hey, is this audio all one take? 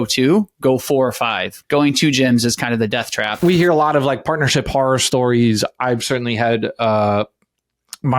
no; 2 cuts; at 1.5 s, 3.4 s

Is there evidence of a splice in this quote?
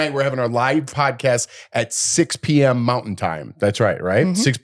yes; 1 cut; at 0.9 s

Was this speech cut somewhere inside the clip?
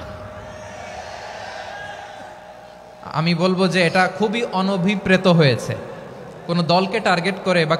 no; 0 cuts

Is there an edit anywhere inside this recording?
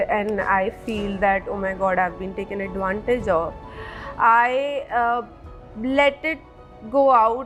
no; 0 cuts

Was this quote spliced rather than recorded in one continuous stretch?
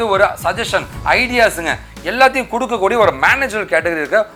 no; 0 cuts

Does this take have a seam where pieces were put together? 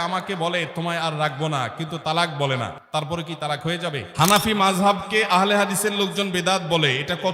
yes; 1 cut; at 4.1 s

